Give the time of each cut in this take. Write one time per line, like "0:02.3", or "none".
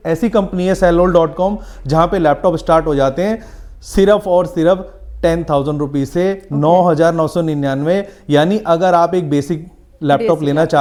none